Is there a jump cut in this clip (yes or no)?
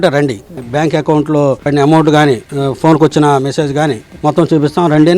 yes